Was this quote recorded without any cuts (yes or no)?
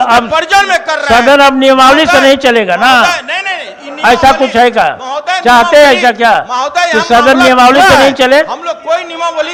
yes